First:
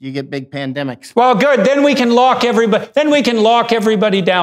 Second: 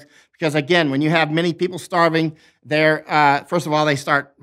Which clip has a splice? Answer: first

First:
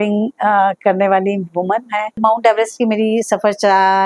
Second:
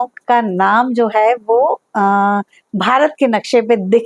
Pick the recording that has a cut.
first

